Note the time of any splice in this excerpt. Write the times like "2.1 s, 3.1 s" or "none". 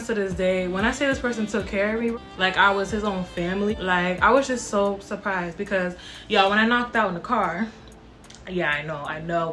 none